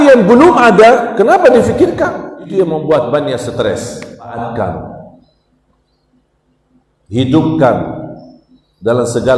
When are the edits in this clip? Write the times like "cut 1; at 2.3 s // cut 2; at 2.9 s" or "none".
cut 1; at 2.5 s // cut 2; at 4.4 s

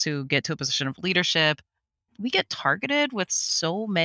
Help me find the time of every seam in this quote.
cut 1; at 2.0 s

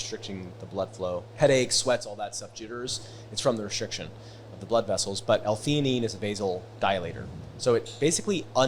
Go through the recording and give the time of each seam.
cut 1; at 1.3 s

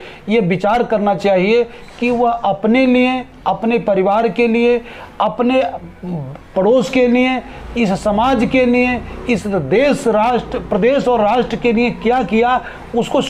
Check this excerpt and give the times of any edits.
none

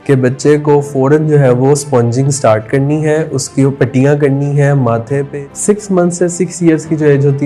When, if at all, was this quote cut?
cut 1; at 5.3 s

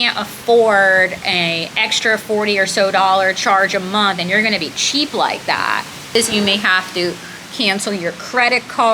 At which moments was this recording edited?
cut 1; at 6.2 s

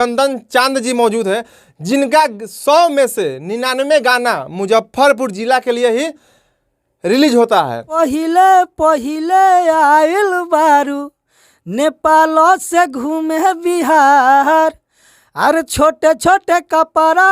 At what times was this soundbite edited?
cut 1; at 8.0 s

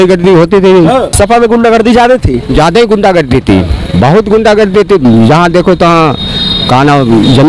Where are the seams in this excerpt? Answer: cut 1; at 1.1 s

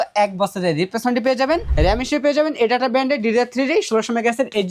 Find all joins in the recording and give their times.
cut 1; at 1.7 s

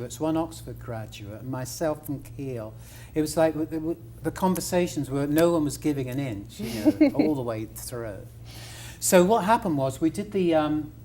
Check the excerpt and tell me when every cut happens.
cut 1; at 5.2 s

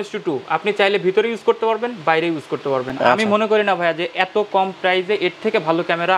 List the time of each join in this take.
cut 1; at 2.9 s

